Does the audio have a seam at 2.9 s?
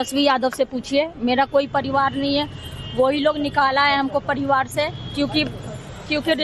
no; 0 cuts

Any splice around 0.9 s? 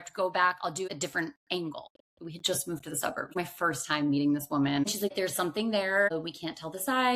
yes; 4 cuts; at 0.9 s, 1.9 s, 3.3 s, 5.0 s

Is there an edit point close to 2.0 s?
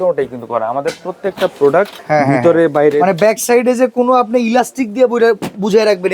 yes; 1 cut; at 2.0 s

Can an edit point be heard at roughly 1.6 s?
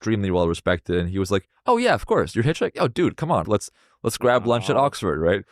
no; 1 cut; at 3.5 s

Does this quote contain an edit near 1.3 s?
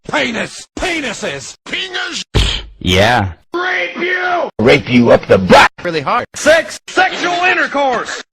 no; 1 cut; at 4.9 s

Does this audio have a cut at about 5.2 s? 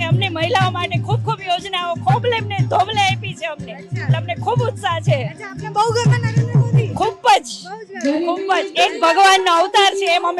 no; 0 cuts

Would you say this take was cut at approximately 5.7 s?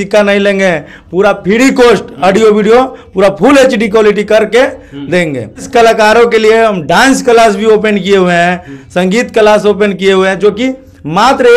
yes; 1 cut; at 5.7 s

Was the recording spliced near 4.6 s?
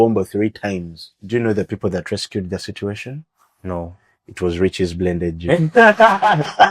no; 1 cut; at 1.1 s

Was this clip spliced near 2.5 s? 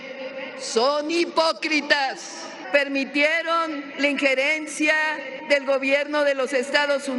yes; 3 cuts; at 2.5 s, 3.9 s, 5.3 s

